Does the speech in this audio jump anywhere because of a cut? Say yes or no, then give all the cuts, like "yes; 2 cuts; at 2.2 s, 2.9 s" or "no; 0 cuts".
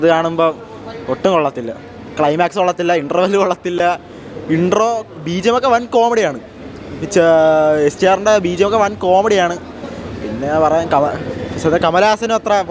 no; 0 cuts